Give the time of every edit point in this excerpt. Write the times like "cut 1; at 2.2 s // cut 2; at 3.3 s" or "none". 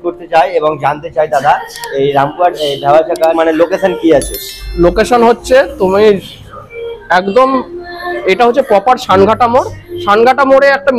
cut 1; at 3.3 s